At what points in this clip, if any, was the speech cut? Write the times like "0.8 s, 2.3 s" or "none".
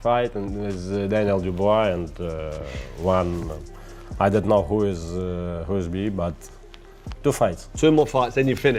none